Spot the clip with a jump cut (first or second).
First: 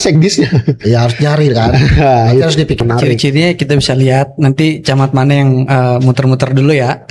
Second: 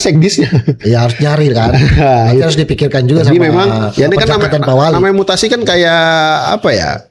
first